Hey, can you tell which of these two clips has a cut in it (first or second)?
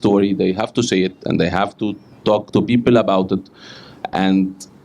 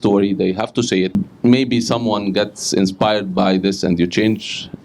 second